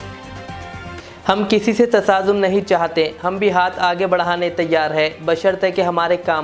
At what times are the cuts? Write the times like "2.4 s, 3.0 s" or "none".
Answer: 1.0 s